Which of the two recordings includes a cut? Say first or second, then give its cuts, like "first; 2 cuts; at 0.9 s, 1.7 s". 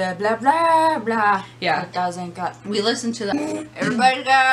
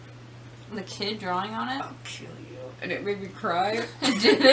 first; 1 cut; at 3.3 s